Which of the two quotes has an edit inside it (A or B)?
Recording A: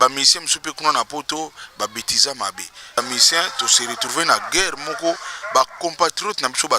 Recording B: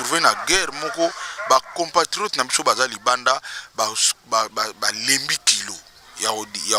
A